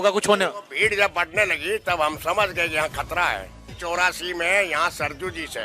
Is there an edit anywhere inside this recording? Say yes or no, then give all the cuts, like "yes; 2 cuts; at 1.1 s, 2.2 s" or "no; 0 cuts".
yes; 1 cut; at 3.7 s